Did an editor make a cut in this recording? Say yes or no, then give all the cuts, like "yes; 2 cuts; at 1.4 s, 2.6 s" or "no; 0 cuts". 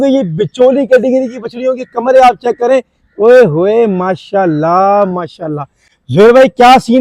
no; 0 cuts